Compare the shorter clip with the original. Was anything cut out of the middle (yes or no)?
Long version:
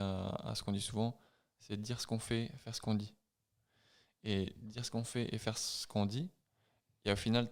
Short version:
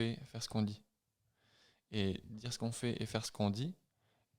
yes